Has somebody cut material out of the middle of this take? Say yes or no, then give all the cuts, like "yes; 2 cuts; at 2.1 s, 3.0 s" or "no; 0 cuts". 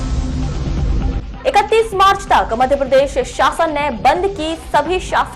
yes; 1 cut; at 1.2 s